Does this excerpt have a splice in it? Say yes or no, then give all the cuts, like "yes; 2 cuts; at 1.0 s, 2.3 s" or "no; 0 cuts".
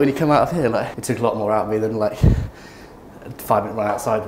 no; 0 cuts